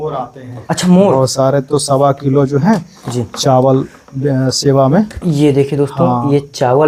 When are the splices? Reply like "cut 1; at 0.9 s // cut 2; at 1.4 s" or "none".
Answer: none